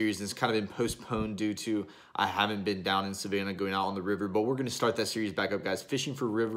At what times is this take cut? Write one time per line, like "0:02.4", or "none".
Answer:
none